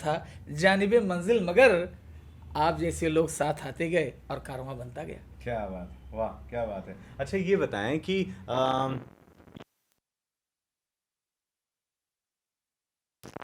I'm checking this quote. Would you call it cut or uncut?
uncut